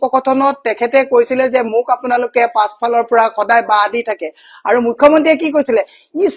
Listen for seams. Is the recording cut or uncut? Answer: uncut